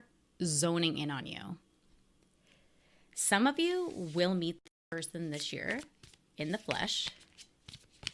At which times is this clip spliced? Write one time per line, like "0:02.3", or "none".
none